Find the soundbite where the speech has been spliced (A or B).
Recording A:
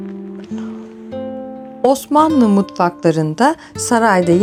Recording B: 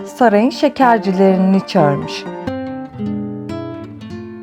B